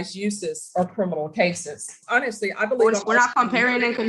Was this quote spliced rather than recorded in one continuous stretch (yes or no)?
yes